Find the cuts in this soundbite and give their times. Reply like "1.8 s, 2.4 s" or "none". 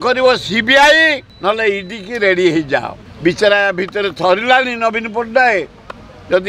1.3 s, 3.0 s